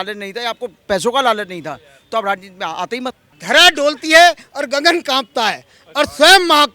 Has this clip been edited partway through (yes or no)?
yes